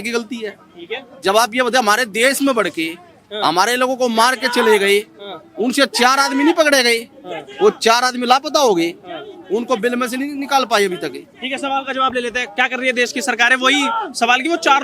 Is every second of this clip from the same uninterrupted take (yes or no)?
yes